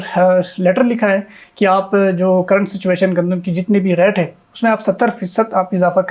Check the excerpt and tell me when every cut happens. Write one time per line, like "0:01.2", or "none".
none